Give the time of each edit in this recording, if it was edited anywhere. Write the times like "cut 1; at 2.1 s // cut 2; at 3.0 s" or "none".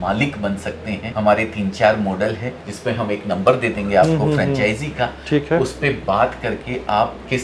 none